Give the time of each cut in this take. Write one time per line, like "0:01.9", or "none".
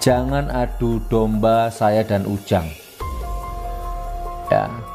0:02.7
0:04.1